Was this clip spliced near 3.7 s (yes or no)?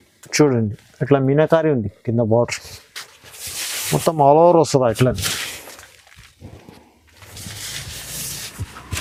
no